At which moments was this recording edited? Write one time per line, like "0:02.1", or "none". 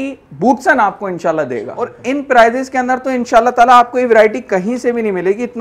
0:01.9